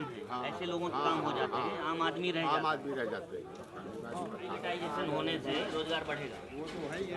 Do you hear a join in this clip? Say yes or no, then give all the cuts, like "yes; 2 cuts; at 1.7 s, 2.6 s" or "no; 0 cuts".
yes; 1 cut; at 4.7 s